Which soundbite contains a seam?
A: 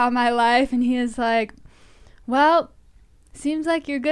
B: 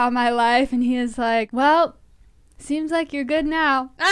B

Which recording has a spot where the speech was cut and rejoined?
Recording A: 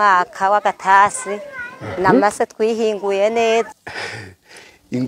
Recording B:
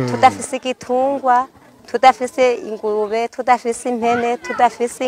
A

